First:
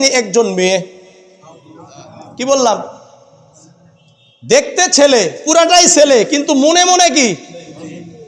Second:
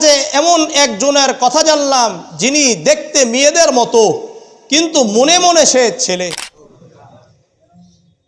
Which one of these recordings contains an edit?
second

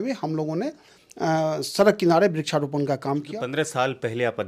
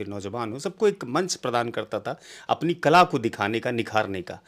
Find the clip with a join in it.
first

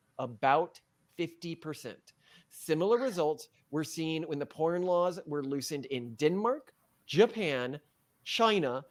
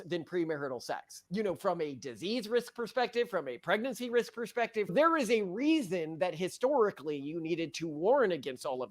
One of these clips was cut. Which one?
second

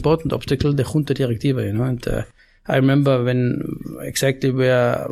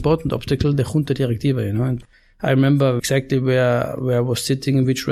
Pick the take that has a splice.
second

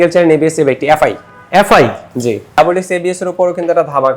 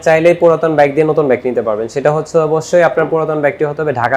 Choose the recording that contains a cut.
first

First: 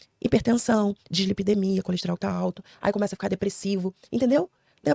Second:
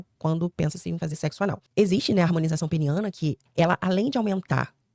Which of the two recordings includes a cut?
second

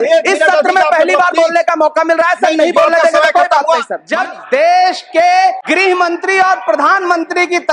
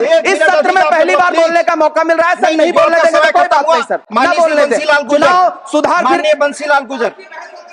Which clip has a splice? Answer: first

